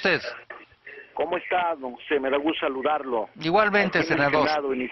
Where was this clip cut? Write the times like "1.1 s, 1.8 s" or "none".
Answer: none